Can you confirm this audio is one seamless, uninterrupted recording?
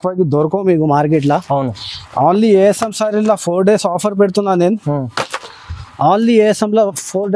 yes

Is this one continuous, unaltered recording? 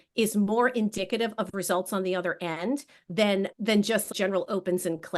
no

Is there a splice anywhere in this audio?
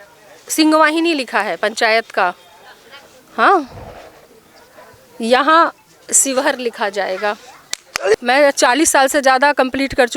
yes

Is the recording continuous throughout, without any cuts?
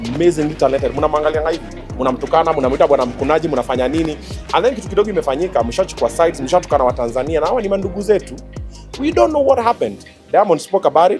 yes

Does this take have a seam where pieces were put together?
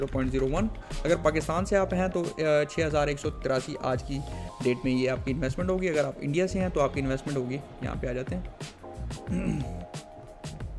no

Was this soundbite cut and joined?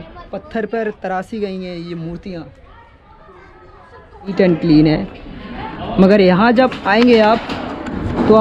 yes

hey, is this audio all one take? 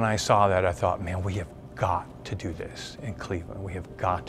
yes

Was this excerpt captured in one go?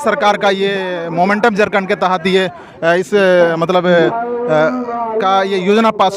yes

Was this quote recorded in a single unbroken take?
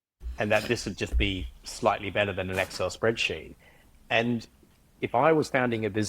no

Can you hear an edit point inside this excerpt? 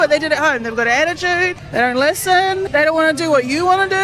yes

